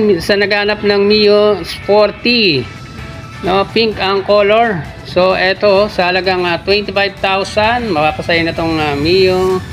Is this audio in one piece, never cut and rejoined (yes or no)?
yes